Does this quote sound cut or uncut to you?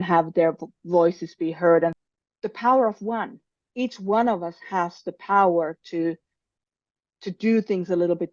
cut